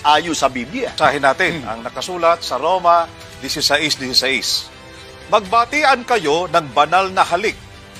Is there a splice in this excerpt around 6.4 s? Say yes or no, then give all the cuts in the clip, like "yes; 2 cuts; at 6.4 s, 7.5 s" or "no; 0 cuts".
no; 1 cut; at 1.0 s